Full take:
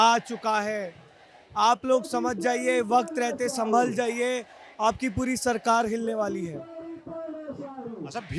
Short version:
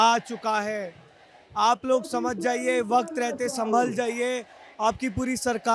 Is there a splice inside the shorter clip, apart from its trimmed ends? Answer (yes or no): no